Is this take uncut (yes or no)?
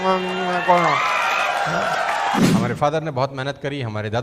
no